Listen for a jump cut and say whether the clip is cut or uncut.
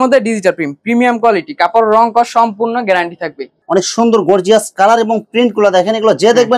cut